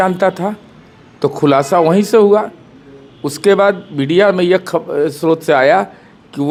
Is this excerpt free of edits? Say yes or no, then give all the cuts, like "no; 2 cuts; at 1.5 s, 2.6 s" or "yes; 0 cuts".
yes; 0 cuts